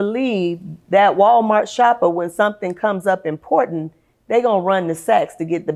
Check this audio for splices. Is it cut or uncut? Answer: uncut